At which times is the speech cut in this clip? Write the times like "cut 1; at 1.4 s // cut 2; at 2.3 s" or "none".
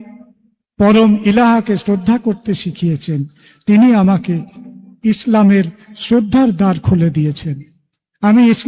none